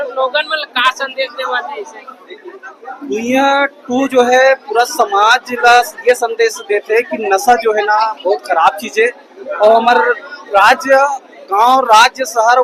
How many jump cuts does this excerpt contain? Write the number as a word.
zero